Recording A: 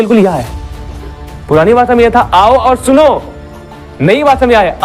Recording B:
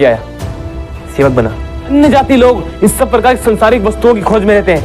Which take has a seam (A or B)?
B